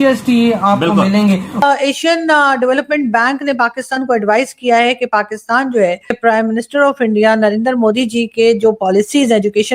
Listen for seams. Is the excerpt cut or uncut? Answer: cut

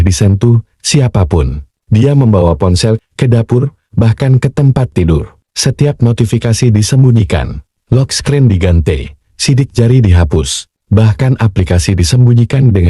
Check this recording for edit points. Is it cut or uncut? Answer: cut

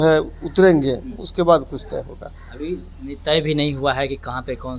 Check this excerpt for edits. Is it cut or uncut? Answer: uncut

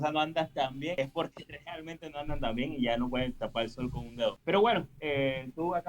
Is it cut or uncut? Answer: cut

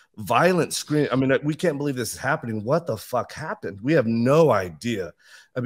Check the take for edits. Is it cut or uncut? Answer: uncut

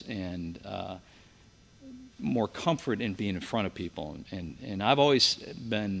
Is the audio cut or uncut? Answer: uncut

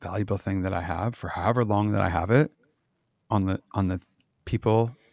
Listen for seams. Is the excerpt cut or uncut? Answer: uncut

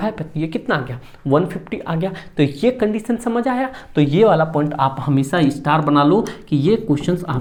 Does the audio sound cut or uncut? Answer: uncut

